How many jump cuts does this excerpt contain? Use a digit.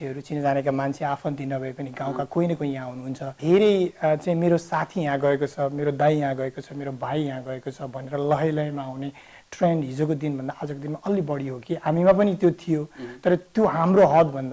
1